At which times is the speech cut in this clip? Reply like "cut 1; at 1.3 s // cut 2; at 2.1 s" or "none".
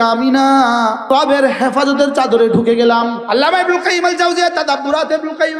cut 1; at 1.1 s // cut 2; at 3.2 s